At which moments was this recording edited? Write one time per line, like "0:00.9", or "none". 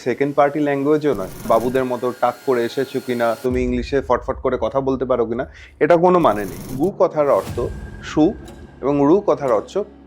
0:01.5
0:06.6